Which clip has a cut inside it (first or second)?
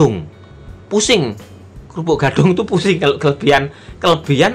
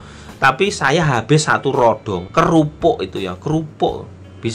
second